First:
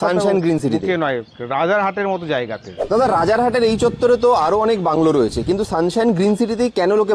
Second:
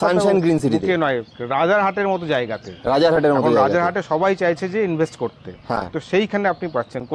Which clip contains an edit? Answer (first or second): first